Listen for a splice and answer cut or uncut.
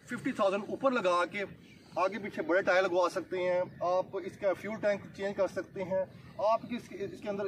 uncut